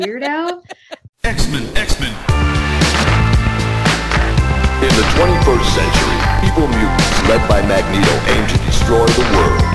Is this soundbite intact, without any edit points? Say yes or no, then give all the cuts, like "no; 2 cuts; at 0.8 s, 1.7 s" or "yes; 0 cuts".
no; 1 cut; at 1.0 s